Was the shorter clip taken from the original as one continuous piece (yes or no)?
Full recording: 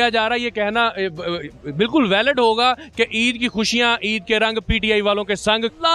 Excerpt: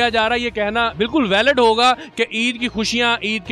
no